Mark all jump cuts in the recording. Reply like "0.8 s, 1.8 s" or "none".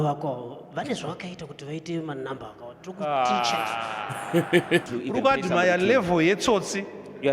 4.9 s